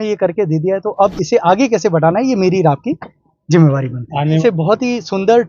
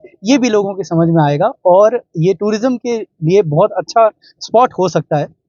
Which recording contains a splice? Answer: first; 1 cut; at 4.4 s

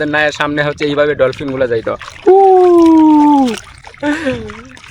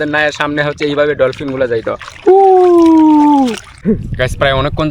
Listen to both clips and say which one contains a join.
second; 1 cut; at 3.8 s

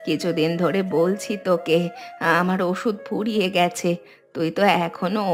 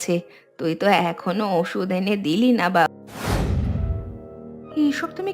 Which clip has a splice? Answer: second; 1 cut; at 2.9 s

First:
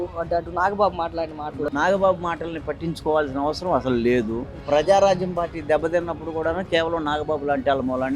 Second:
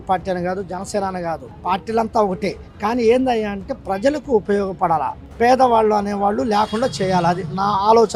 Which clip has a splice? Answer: first; 2 cuts; at 1.7 s, 4.6 s

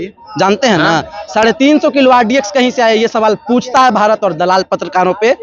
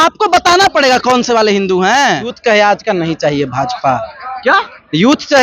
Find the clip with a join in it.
second; 1 cut; at 2.4 s

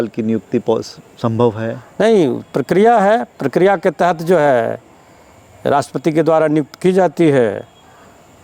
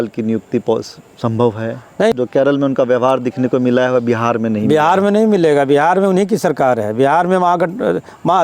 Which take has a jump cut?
second; 1 cut; at 2.1 s

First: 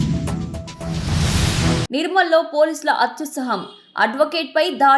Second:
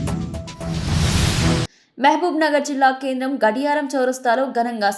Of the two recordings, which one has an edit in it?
first; 1 cut; at 1.8 s

